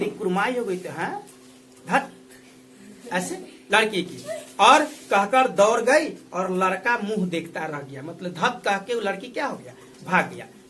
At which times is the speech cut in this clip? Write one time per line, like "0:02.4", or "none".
none

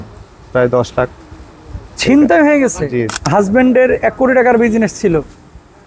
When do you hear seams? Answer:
0:03.1

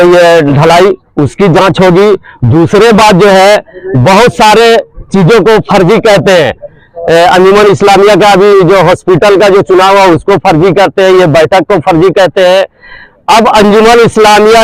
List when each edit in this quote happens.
none

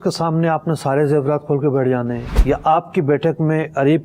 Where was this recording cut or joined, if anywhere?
0:02.3

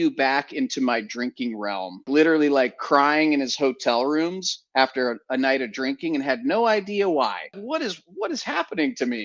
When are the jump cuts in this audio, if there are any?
0:02.1
0:07.6

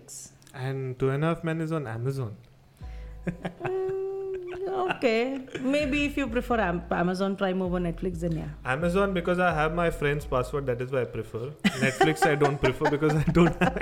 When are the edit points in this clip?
none

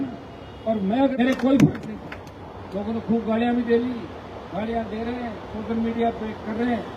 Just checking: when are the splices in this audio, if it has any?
0:01.1

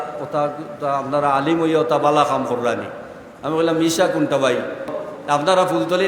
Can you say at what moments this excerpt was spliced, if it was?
0:05.1

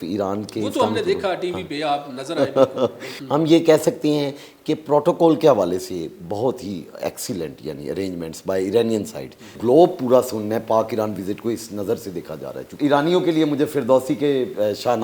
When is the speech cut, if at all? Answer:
0:03.1
0:09.6
0:12.7

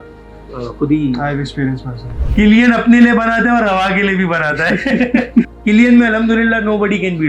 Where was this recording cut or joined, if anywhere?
0:02.1
0:05.5

